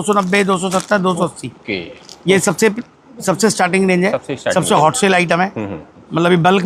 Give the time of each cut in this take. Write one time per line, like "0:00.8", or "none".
none